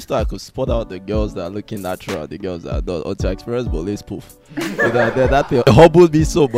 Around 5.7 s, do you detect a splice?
yes; 1 cut; at 5.7 s

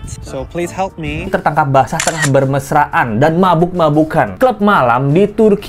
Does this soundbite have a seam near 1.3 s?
yes; 2 cuts; at 1.3 s, 4.3 s

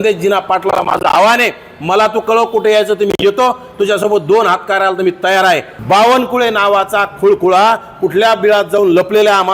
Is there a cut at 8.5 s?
no; 1 cut; at 5.7 s

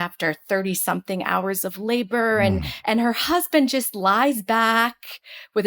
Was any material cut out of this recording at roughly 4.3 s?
no; 1 cut; at 2.7 s

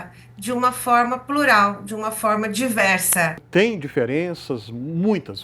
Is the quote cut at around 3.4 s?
yes; 1 cut; at 3.4 s

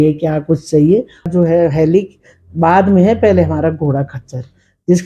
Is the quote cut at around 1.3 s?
yes; 1 cut; at 1.3 s

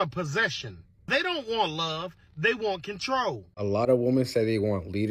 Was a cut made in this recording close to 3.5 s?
yes; 1 cut; at 3.5 s

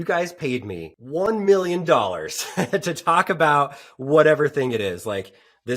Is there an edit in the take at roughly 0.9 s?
yes; 1 cut; at 0.9 s

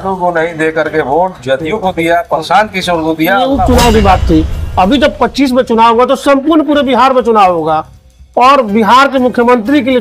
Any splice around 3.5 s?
yes; 1 cut; at 3.5 s

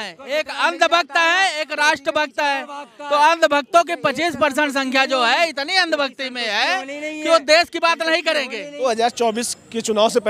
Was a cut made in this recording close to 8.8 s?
yes; 1 cut; at 8.8 s

